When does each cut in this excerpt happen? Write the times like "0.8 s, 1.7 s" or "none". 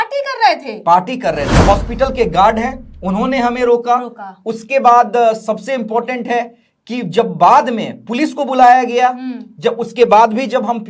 1.5 s